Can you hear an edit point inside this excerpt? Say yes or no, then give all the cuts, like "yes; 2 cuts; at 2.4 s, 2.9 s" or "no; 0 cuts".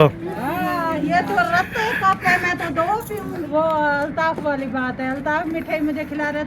yes; 1 cut; at 3.4 s